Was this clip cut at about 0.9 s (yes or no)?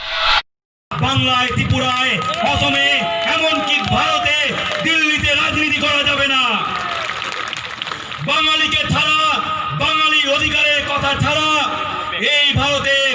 yes